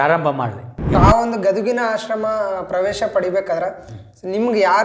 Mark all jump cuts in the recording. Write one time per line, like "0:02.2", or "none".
0:01.0